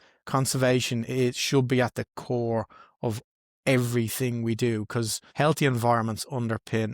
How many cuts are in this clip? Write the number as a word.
one